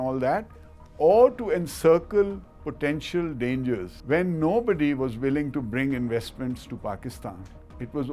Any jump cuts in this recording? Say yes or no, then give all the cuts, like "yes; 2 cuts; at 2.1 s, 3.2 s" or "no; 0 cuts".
yes; 1 cut; at 3.9 s